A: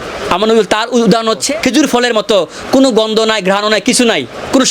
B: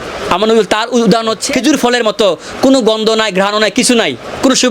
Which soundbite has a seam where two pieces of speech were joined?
B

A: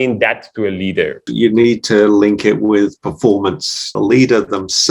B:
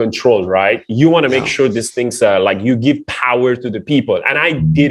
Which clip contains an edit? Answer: A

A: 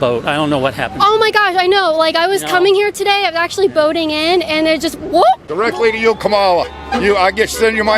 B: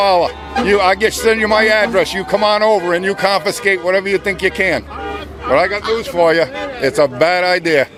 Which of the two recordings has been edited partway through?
A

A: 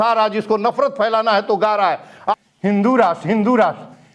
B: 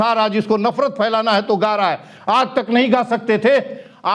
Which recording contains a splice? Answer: A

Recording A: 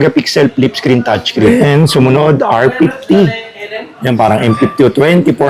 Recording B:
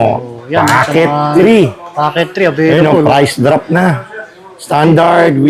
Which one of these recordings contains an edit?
A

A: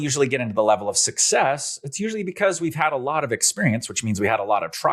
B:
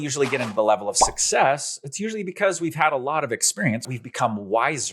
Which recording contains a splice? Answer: B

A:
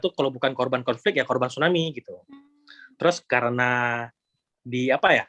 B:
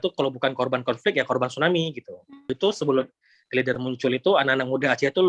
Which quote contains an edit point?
B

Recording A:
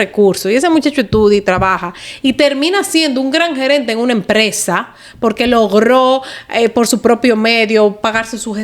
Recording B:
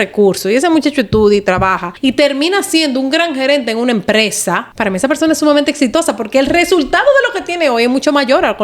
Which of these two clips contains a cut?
B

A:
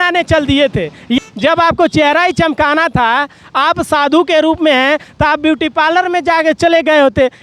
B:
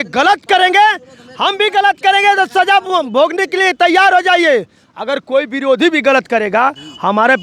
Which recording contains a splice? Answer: A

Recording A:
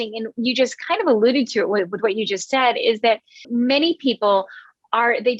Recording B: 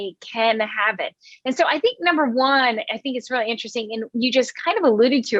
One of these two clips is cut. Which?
A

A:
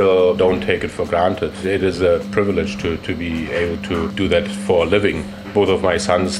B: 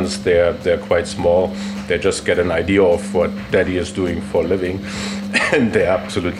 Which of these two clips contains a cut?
A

